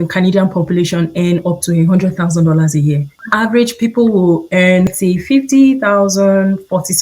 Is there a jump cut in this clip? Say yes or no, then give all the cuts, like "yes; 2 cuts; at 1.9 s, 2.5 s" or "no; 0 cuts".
yes; 2 cuts; at 3.2 s, 4.9 s